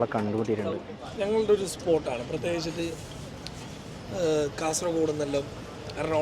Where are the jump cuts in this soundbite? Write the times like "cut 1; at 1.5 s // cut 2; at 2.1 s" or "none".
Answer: cut 1; at 1.0 s